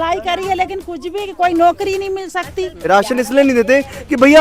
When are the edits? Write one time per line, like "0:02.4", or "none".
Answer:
0:02.8